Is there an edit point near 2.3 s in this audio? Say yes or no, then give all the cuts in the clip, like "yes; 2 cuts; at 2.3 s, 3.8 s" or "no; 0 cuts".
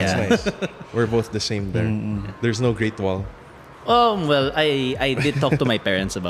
yes; 1 cut; at 2.3 s